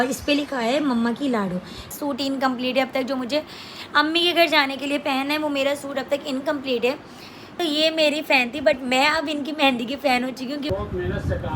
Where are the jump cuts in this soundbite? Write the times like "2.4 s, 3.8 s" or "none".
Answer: 1.9 s, 7.5 s, 10.7 s